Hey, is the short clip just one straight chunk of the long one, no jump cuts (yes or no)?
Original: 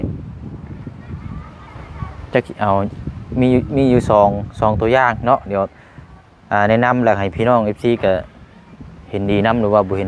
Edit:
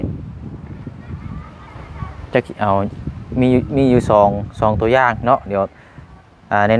yes